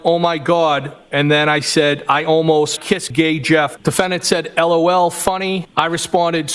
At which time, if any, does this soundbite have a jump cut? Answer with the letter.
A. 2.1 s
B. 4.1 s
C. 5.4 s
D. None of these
D